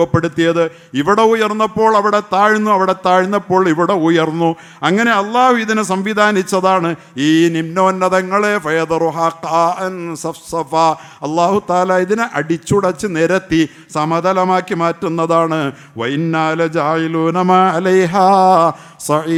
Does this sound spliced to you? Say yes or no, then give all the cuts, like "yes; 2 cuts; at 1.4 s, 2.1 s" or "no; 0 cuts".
no; 0 cuts